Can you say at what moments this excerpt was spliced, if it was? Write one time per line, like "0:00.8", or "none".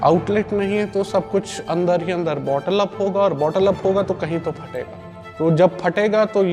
none

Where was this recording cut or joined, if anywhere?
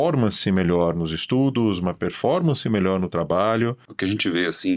0:03.9

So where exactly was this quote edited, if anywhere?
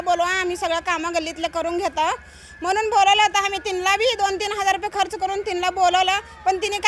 none

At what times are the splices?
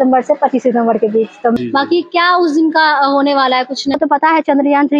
0:01.6
0:04.0

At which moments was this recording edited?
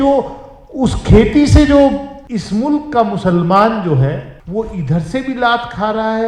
0:02.2
0:04.3

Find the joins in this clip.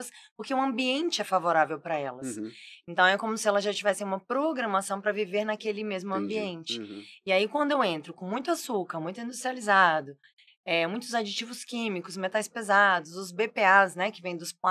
none

